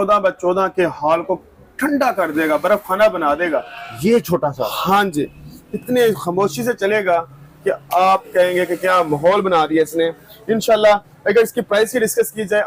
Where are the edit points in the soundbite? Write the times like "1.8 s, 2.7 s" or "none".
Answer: none